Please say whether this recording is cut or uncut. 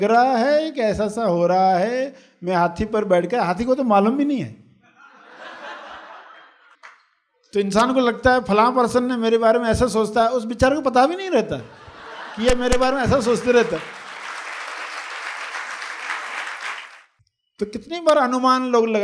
cut